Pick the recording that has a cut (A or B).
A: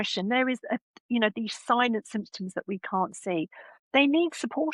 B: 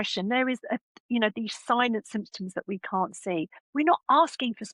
B